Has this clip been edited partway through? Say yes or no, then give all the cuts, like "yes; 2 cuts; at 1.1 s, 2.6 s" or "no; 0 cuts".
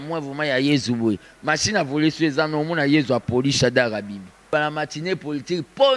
yes; 1 cut; at 4.4 s